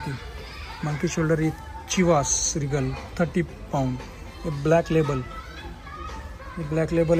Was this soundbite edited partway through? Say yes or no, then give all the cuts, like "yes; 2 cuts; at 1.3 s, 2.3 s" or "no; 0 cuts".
no; 0 cuts